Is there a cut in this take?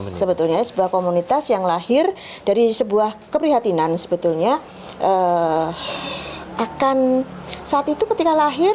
no; 0 cuts

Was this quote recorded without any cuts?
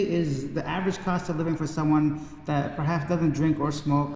yes; 0 cuts

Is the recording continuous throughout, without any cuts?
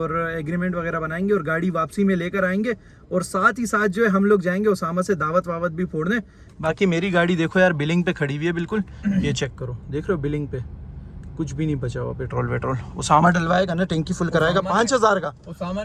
yes; 0 cuts

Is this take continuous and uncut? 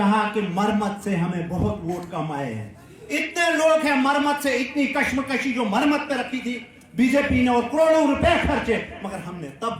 yes; 0 cuts

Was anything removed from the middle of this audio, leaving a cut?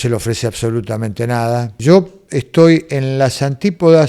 yes; 1 cut; at 1.8 s

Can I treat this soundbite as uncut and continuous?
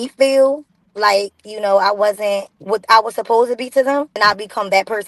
no; 2 cuts; at 2.5 s, 4.2 s

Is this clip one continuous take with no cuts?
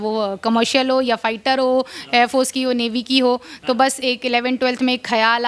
yes; 0 cuts

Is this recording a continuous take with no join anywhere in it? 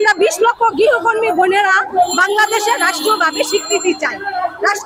yes; 0 cuts

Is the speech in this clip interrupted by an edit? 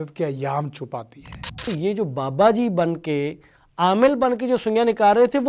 yes; 1 cut; at 1.7 s

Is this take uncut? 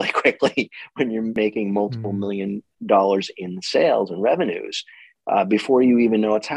no; 1 cut; at 1.4 s

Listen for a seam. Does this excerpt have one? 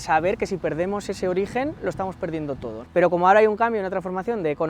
no; 0 cuts

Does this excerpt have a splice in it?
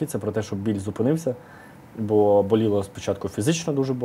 no; 0 cuts

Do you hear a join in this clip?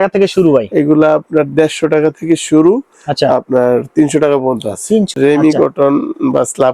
yes; 1 cut; at 5.1 s

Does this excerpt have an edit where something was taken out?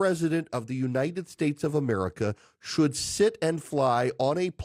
no; 0 cuts

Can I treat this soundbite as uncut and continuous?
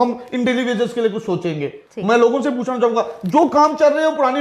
no; 1 cut; at 1.8 s

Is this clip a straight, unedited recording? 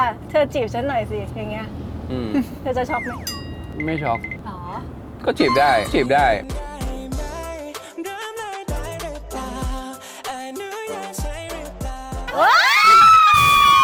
yes; 0 cuts

